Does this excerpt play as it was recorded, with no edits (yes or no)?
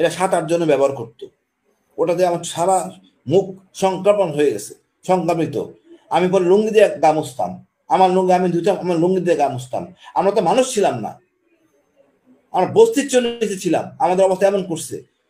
yes